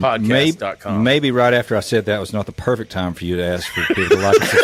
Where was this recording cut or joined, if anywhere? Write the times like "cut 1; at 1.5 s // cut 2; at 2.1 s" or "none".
none